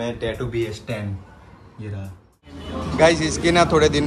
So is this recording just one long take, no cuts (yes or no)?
no